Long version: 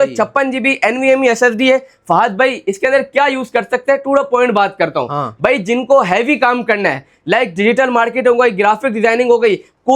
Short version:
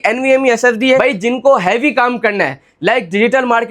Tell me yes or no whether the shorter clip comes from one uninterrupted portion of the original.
no